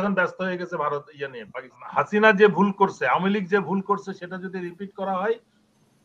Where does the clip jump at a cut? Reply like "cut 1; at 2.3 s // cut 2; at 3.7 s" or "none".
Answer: cut 1; at 1.8 s